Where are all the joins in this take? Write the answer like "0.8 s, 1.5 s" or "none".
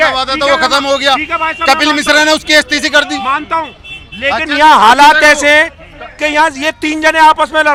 none